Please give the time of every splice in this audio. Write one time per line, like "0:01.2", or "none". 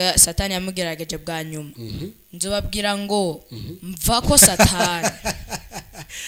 none

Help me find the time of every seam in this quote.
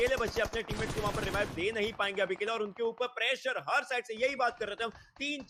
none

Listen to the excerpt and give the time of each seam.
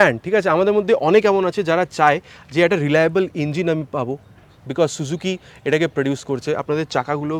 none

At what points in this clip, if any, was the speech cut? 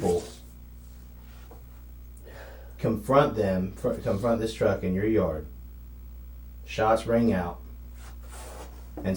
none

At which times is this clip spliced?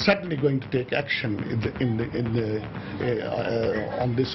none

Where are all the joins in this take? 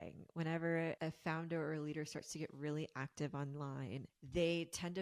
0:01.0
0:04.1

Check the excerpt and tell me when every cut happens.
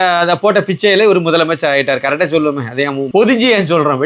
0:03.1

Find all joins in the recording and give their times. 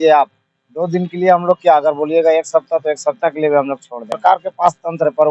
0:04.2

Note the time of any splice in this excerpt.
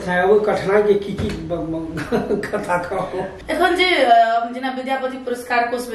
0:03.4

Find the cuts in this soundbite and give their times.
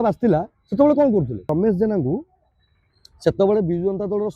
0:01.5

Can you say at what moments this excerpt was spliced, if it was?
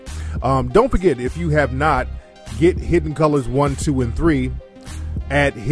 0:02.5

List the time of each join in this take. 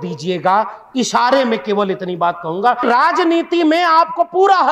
0:02.8

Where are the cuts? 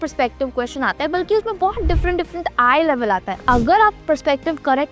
0:03.4

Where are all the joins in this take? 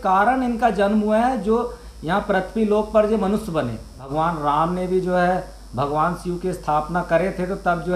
0:04.0

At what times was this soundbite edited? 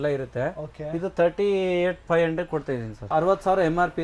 0:02.9

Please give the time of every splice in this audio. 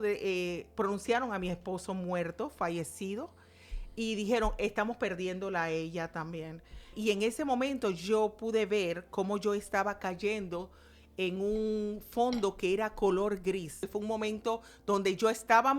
0:06.9
0:13.8

